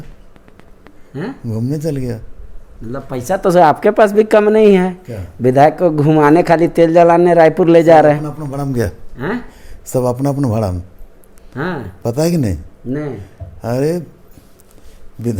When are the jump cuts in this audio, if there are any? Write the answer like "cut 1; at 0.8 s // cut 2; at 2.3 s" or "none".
none